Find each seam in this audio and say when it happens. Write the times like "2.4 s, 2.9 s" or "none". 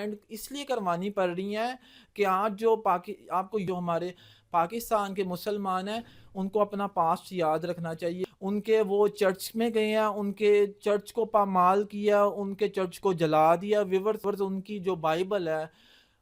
3.7 s, 8.2 s, 14.2 s